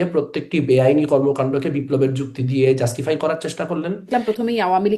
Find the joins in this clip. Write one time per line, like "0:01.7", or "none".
0:04.1